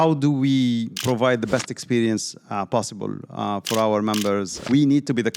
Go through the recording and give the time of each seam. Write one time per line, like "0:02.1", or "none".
0:00.9
0:04.5